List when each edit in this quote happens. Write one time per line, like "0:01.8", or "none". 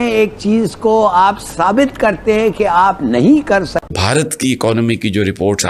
0:03.9